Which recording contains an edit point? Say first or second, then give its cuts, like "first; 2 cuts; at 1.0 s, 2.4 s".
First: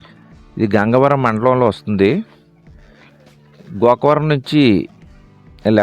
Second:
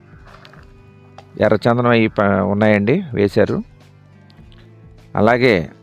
second; 3 cuts; at 1.2 s, 3.7 s, 5.1 s